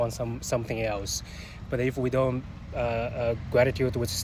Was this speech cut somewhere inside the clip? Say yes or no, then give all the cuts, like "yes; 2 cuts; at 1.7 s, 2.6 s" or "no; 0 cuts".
no; 0 cuts